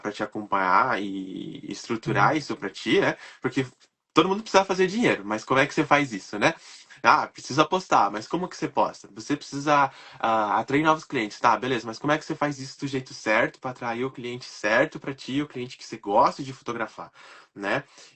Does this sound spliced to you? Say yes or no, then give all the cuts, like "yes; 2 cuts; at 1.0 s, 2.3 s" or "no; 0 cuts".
no; 0 cuts